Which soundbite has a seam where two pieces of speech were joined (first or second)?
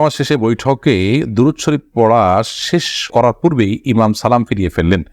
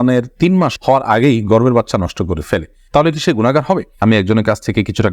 second